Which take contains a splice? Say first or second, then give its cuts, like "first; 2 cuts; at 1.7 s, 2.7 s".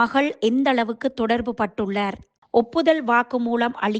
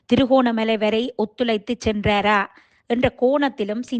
first; 1 cut; at 2.3 s